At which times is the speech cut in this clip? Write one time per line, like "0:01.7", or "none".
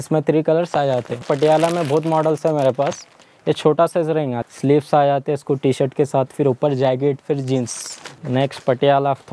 0:01.2
0:04.4
0:08.1